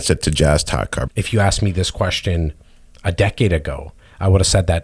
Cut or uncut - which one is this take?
cut